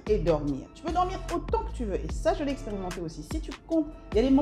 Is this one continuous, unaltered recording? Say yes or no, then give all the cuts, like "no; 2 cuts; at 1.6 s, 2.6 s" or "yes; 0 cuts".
yes; 0 cuts